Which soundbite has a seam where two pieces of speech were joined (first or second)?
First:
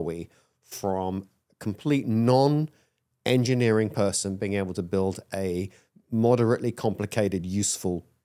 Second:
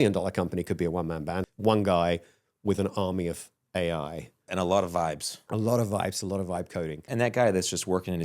second